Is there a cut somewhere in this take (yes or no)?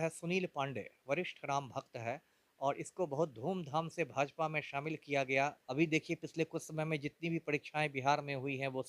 yes